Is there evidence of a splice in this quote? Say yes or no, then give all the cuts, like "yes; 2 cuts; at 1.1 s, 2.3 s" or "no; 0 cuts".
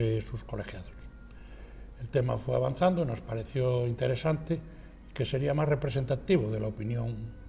no; 0 cuts